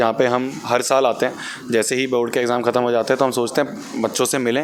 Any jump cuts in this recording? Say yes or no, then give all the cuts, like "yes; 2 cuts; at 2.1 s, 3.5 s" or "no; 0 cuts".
no; 0 cuts